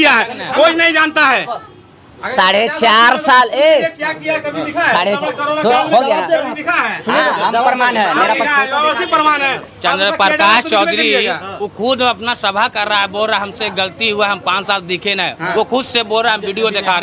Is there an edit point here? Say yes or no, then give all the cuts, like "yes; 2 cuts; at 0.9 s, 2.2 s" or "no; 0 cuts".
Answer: no; 0 cuts